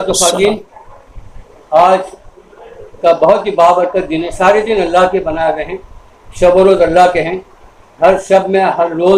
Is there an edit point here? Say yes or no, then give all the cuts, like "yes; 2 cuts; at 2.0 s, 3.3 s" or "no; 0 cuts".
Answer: no; 0 cuts